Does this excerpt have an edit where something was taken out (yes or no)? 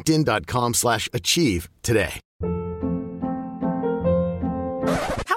yes